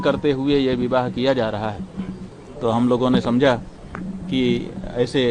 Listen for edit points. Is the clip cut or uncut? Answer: uncut